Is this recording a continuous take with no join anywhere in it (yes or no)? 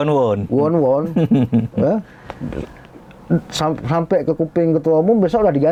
yes